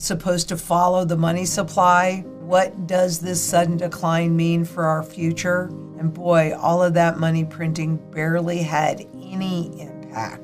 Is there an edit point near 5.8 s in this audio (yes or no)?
yes